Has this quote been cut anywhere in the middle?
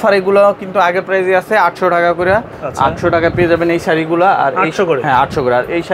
no; 0 cuts

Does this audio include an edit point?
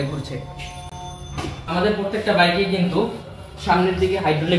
no; 0 cuts

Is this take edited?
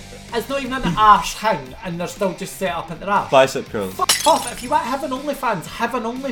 no; 0 cuts

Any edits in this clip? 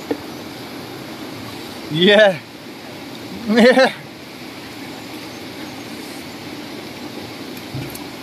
no; 0 cuts

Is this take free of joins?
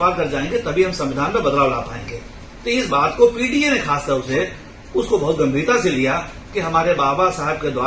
yes; 0 cuts

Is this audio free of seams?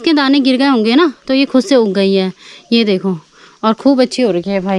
yes; 0 cuts

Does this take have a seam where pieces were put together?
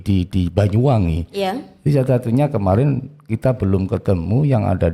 no; 0 cuts

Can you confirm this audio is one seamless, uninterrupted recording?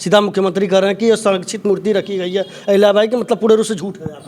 yes; 0 cuts

